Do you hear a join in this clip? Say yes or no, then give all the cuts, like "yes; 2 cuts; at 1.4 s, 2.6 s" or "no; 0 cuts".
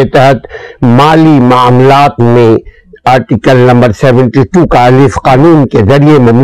no; 0 cuts